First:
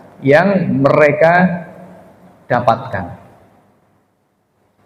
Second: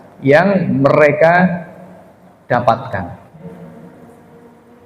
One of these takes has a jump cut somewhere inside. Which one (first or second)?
second